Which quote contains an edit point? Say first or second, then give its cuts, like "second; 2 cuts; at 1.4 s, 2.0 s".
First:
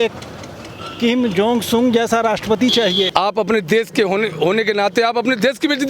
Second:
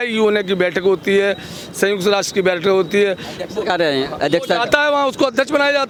first; 1 cut; at 3.1 s